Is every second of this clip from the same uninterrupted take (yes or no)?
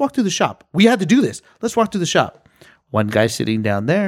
yes